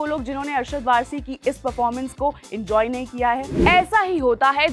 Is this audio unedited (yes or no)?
no